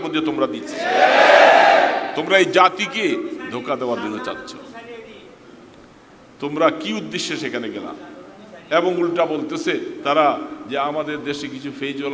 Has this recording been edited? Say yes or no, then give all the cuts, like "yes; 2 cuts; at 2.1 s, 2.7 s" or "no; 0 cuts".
no; 0 cuts